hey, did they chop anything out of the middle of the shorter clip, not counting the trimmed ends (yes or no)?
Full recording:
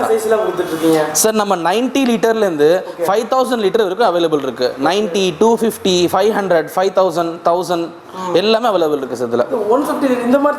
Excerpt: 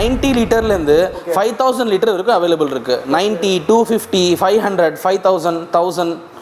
no